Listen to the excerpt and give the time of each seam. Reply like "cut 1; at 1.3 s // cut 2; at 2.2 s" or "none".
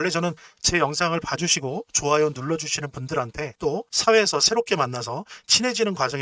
cut 1; at 3.4 s